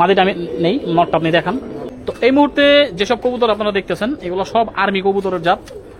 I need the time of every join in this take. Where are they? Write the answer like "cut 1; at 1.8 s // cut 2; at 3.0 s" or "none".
cut 1; at 1.8 s

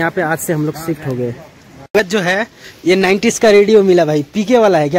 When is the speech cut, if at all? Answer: cut 1; at 2.0 s

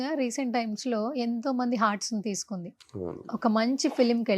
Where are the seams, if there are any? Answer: none

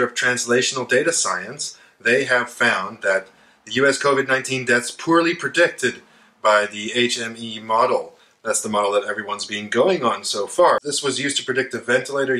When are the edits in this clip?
cut 1; at 10.8 s

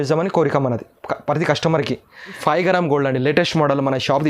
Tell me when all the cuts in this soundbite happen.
cut 1; at 2.4 s

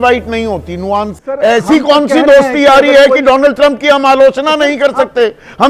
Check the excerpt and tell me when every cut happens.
cut 1; at 1.1 s

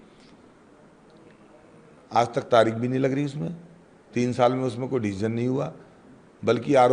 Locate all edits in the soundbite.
none

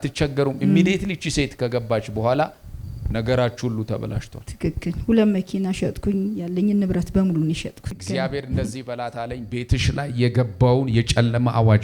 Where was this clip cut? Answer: cut 1; at 7.9 s

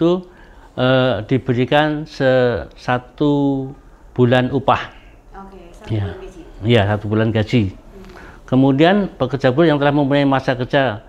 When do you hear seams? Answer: none

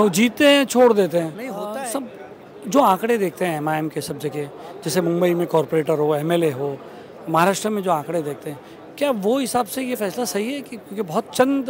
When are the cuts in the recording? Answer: cut 1; at 1.7 s

